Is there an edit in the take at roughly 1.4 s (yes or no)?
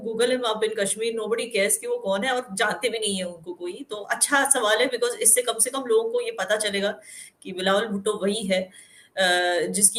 no